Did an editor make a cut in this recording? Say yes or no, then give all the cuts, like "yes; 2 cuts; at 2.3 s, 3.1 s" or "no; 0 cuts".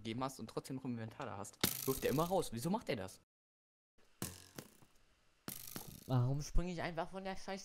yes; 1 cut; at 3.9 s